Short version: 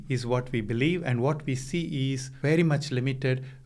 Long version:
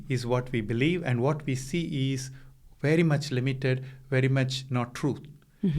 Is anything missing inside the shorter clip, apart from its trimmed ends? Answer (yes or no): yes